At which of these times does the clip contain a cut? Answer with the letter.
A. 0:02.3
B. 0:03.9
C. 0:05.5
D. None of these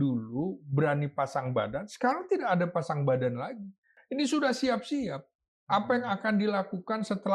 B